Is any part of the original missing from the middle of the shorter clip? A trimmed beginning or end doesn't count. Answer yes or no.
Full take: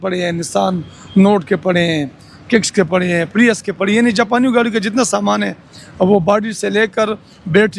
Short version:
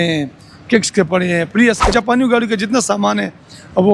yes